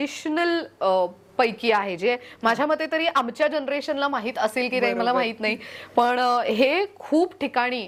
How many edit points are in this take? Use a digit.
0